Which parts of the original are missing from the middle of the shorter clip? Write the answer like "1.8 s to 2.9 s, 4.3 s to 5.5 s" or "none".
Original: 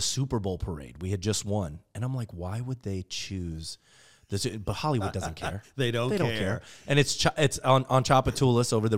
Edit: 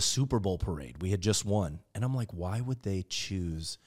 none